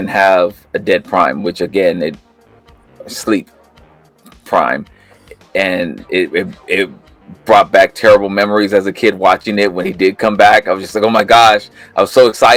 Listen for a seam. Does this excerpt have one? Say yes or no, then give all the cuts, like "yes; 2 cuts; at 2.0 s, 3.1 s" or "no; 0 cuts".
no; 0 cuts